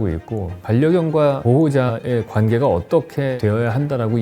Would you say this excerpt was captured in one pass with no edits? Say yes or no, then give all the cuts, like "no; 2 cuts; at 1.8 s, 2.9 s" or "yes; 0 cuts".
no; 2 cuts; at 1.8 s, 3.3 s